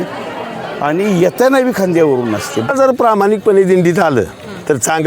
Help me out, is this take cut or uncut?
cut